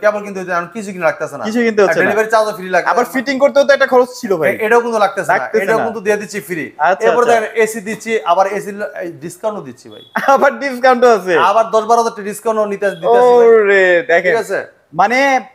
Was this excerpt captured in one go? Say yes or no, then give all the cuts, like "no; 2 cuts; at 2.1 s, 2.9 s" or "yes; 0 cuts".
yes; 0 cuts